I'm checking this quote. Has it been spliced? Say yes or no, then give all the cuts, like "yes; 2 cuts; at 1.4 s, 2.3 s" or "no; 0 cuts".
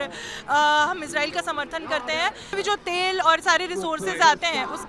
yes; 1 cut; at 2.5 s